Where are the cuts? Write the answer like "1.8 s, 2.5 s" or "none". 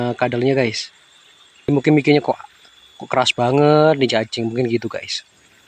1.7 s